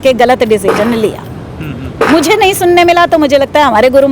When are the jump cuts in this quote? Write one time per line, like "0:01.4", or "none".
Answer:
none